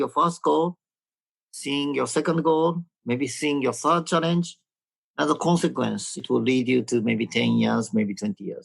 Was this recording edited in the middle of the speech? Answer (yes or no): yes